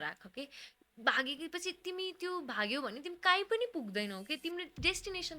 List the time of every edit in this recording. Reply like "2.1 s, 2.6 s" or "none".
none